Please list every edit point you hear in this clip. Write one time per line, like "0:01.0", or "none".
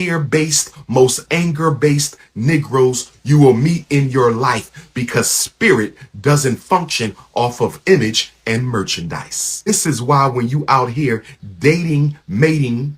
0:09.7

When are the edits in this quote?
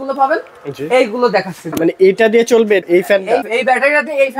0:01.7

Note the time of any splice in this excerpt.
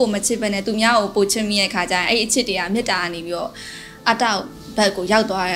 none

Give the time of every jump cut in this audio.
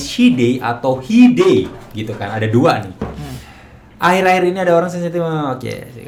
none

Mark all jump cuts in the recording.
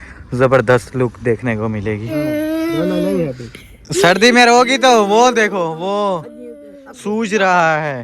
0:02.1

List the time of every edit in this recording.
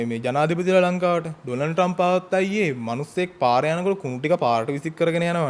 none

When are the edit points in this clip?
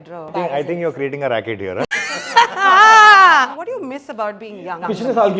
0:03.6

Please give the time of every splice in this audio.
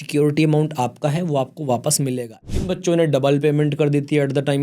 0:02.3

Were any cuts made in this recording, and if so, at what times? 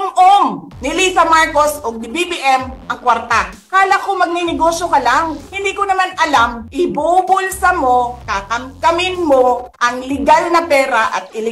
0:03.5
0:05.4
0:06.6

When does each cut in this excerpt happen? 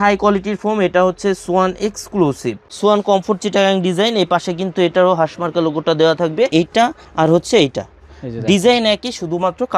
0:02.6
0:06.5

